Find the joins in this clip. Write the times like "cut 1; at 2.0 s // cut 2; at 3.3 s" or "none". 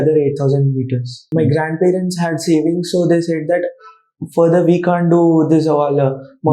cut 1; at 1.2 s